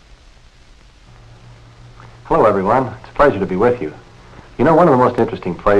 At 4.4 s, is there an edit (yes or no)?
yes